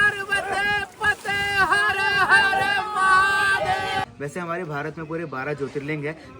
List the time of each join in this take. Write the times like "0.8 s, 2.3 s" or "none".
4.0 s